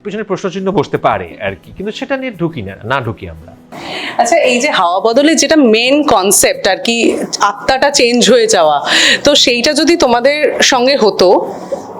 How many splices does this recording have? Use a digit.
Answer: 0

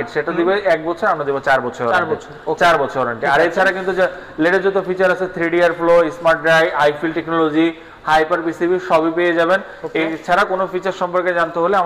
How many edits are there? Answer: 0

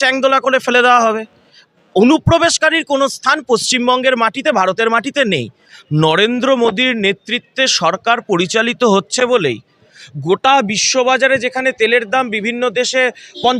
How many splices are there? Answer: 1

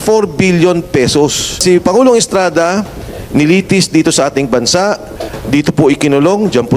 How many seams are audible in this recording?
1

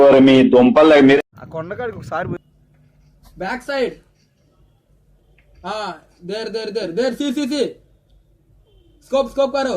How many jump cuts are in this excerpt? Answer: 1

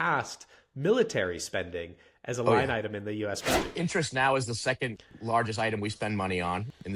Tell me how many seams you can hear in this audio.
1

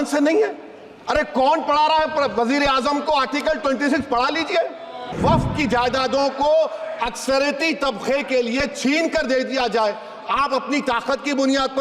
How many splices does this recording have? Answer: 1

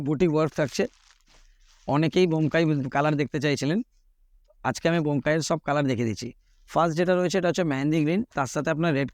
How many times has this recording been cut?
1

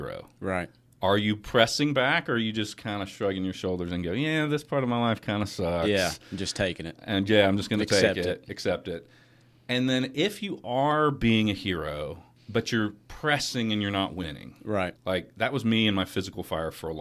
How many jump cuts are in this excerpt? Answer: 2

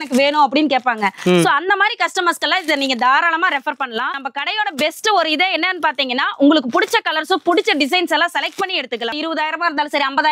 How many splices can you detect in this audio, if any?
2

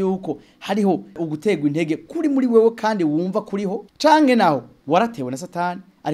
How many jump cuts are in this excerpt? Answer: 3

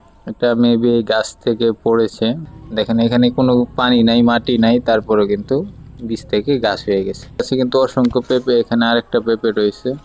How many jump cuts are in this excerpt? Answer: 2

